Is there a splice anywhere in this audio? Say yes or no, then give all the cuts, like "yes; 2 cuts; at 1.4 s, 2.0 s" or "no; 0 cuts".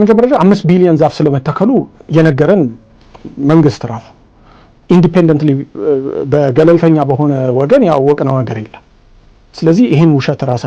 no; 0 cuts